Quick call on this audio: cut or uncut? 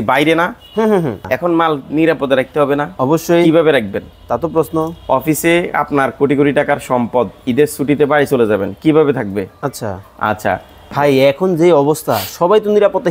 cut